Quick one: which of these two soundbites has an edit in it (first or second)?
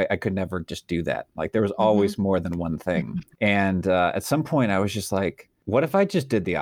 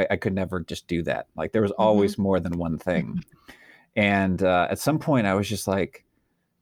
first